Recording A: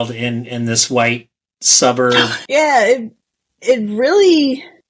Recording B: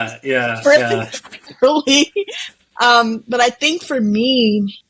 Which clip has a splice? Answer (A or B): A